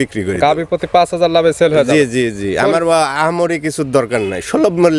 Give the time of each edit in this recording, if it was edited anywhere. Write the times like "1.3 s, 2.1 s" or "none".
none